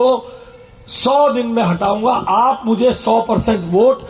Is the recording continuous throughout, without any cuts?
yes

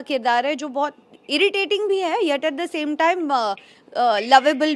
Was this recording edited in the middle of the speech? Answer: no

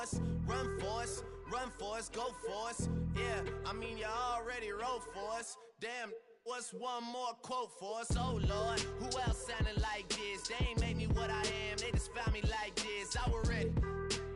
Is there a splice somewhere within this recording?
no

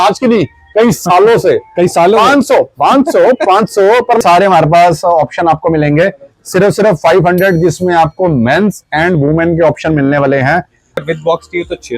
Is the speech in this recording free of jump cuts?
no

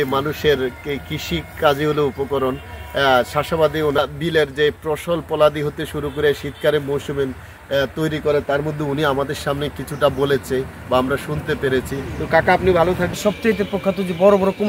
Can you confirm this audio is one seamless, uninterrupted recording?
yes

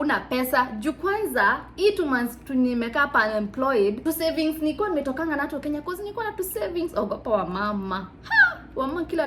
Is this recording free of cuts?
yes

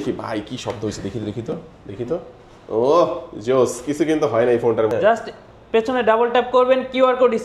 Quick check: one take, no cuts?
no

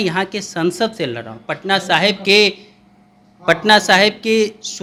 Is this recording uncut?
yes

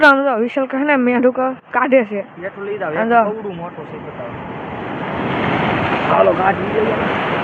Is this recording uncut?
yes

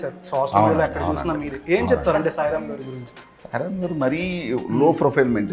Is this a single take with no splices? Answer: no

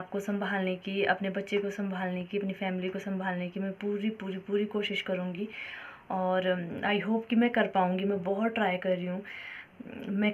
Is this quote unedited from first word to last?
yes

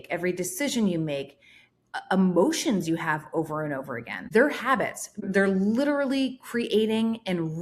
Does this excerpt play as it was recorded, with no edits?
no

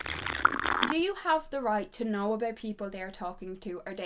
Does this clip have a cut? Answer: no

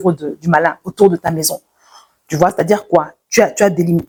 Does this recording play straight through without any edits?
yes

